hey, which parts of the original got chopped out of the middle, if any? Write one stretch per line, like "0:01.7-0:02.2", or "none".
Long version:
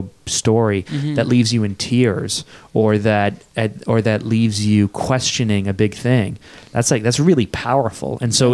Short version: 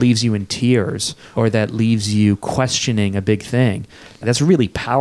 0:02.5-0:03.8
0:06.7-0:07.0